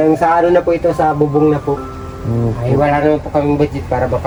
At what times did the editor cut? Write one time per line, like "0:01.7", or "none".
none